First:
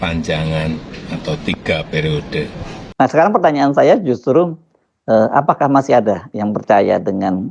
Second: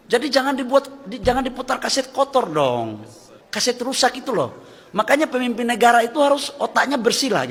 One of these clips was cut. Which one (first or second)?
first